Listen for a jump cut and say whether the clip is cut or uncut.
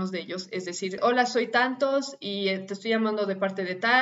cut